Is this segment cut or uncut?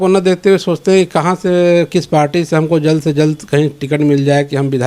uncut